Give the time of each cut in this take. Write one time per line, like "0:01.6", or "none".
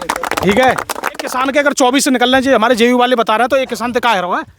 0:01.3